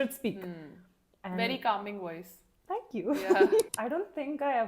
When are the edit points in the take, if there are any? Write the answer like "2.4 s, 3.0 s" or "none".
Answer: 3.7 s